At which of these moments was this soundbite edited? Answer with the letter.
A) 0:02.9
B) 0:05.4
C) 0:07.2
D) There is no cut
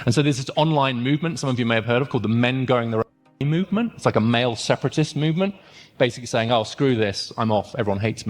C